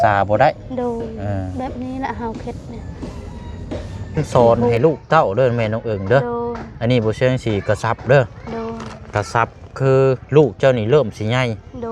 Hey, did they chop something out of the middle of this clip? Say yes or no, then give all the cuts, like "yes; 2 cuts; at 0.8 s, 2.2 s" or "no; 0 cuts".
yes; 1 cut; at 4.2 s